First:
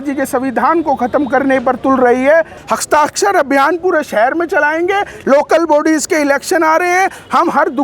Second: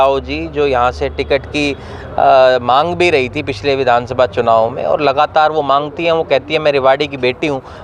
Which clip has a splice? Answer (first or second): first